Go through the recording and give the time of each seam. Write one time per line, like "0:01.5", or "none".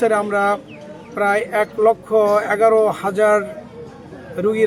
none

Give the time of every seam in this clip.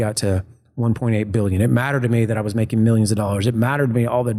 none

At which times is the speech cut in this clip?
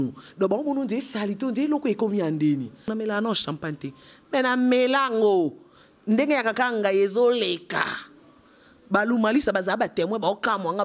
0:02.9

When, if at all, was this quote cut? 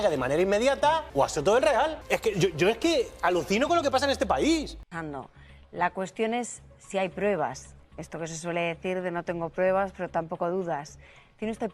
0:01.1
0:02.0
0:04.8

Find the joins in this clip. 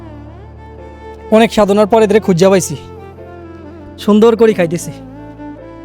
0:01.3

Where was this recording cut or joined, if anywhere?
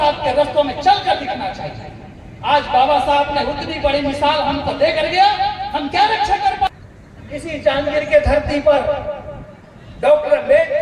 0:06.7

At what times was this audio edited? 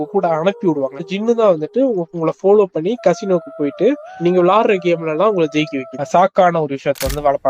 0:05.9

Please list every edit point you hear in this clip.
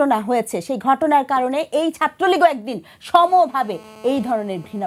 none

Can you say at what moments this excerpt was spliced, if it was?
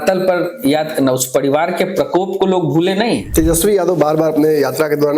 0:03.3

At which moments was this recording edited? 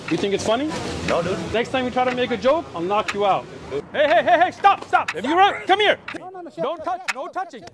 0:01.5
0:03.9
0:06.1

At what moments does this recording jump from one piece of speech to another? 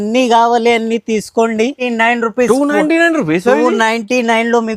0:01.8

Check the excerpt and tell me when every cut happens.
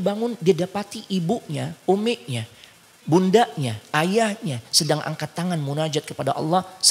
none

